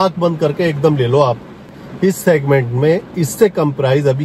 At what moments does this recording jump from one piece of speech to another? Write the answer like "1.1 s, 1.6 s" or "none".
1.7 s